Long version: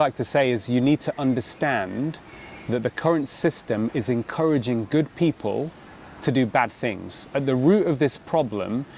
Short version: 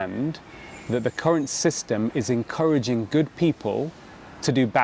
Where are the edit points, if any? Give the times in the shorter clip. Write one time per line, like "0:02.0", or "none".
none